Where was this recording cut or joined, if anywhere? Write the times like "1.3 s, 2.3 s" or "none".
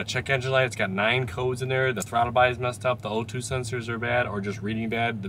none